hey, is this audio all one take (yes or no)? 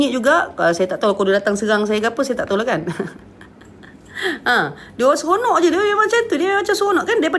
yes